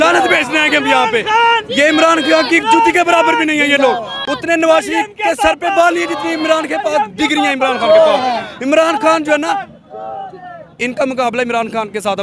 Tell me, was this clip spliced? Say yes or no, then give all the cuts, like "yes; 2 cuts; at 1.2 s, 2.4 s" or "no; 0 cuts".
no; 0 cuts